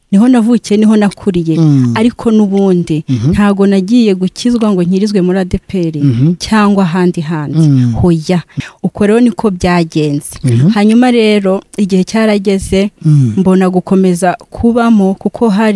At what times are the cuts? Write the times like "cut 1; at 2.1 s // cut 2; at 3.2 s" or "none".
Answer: cut 1; at 8.6 s